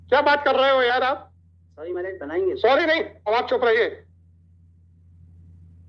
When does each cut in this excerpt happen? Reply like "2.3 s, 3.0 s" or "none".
none